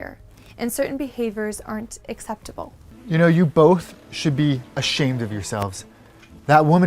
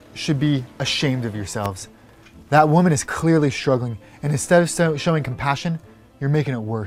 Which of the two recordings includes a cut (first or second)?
first